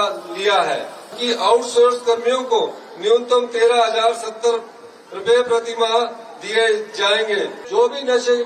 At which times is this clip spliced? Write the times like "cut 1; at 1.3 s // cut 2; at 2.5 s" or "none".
cut 1; at 1.2 s // cut 2; at 7.6 s